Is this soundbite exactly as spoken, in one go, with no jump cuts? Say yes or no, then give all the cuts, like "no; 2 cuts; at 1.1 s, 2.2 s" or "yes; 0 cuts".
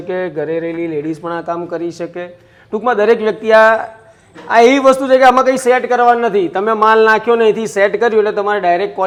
yes; 0 cuts